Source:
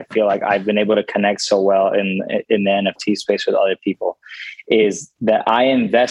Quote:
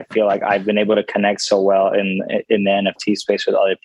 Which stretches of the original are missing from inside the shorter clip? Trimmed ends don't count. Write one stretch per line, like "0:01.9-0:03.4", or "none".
none